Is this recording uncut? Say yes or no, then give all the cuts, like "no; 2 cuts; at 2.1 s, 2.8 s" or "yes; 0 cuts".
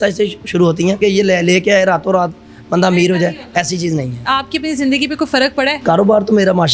no; 3 cuts; at 1.0 s, 4.3 s, 5.8 s